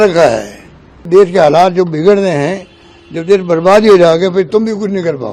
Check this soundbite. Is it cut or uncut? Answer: cut